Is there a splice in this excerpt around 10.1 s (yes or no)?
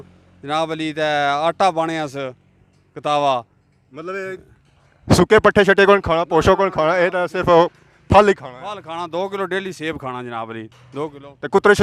no